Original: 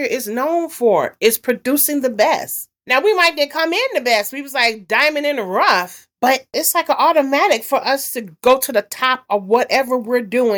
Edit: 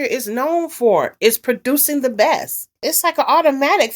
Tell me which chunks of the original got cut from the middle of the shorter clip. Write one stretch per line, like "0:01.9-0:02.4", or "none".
0:02.8-0:06.5

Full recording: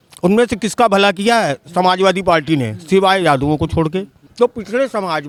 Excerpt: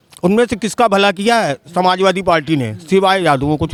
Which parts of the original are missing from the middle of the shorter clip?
none

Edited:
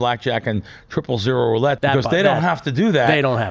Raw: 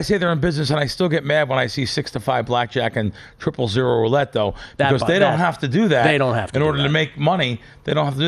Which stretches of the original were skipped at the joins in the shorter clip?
0:04.3-0:04.7

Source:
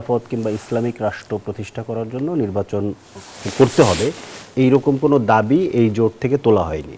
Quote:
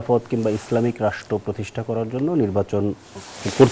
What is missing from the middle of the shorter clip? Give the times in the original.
none

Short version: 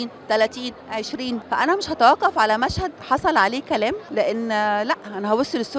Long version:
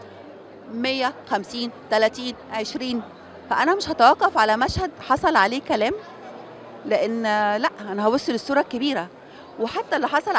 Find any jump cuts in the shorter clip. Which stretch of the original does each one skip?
0:03.1-0:03.4
0:06.0-0:06.8

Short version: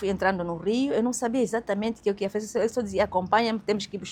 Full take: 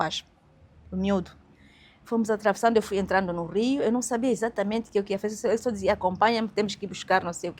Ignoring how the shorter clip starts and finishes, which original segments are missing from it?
none

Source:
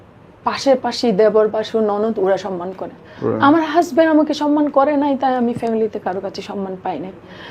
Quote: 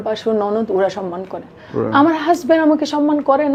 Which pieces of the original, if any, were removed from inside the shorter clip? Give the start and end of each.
none

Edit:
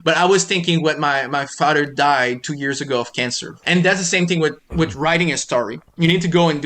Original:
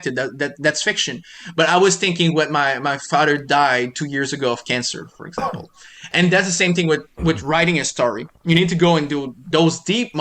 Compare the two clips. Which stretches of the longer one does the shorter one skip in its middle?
0:05.0-0:06.0

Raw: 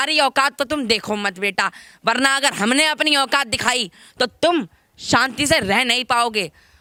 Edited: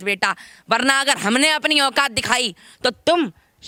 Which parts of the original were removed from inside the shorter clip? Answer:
none

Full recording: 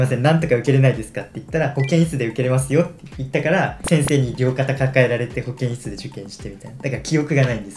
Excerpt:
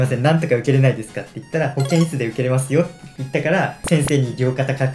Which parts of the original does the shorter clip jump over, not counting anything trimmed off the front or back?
none

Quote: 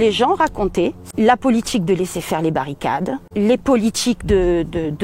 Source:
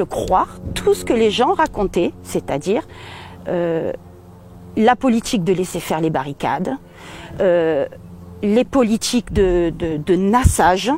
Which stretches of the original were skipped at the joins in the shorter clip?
0:02.2-0:04.6
0:06.8-0:08.3

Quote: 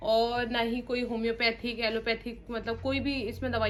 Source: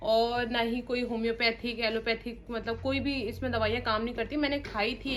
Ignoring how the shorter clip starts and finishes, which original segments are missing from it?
none

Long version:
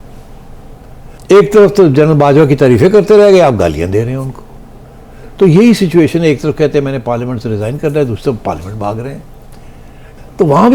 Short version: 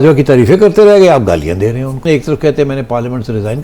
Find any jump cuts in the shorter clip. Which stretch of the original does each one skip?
0:04.4-0:06.2

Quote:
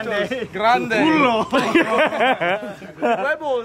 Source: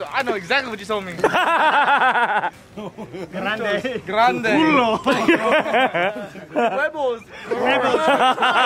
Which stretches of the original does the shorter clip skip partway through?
none

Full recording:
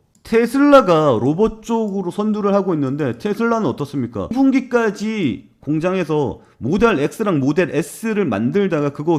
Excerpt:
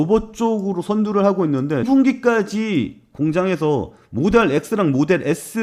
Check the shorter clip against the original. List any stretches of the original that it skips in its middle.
0:03.1-0:04.3

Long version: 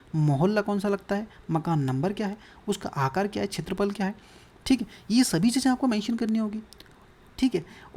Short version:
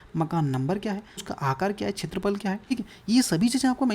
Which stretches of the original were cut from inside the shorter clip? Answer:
0:02.6-0:02.8
0:04.3-0:04.7

